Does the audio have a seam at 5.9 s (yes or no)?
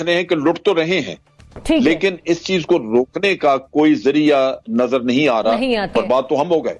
yes